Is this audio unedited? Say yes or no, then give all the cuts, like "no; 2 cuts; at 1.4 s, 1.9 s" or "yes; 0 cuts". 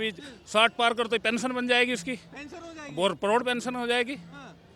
yes; 0 cuts